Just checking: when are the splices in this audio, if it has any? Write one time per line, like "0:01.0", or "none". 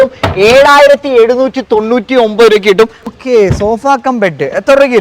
0:03.1